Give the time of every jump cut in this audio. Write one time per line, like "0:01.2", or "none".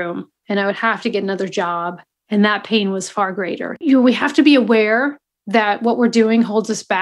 0:03.7